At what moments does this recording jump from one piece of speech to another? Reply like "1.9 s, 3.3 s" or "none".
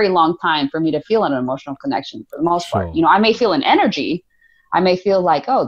none